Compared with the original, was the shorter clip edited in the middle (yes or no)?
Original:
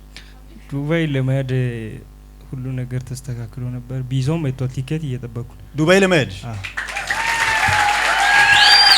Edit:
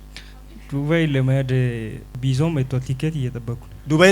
yes